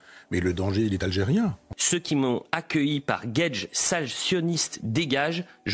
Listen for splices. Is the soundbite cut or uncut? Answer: cut